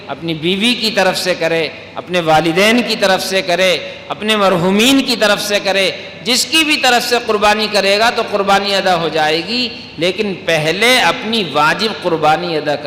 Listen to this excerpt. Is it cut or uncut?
uncut